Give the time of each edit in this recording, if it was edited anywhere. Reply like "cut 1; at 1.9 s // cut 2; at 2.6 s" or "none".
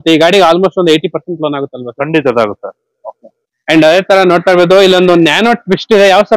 none